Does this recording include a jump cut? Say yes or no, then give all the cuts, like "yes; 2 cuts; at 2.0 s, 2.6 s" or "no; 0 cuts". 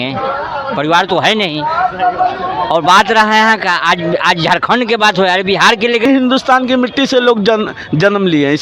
yes; 1 cut; at 6.1 s